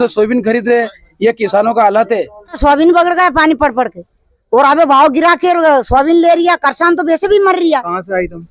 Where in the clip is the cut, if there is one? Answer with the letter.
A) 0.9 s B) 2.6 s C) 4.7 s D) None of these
B